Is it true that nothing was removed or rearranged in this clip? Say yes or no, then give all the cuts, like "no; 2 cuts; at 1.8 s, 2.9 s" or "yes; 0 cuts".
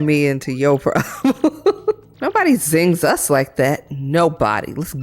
no; 1 cut; at 2.1 s